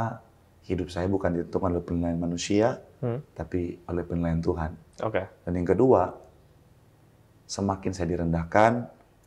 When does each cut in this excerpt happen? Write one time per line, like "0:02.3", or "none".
none